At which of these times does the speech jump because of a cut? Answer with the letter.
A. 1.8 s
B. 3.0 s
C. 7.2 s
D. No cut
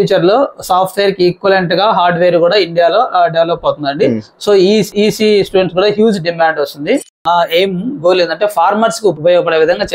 C